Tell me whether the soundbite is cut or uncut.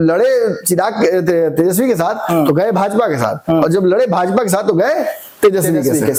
uncut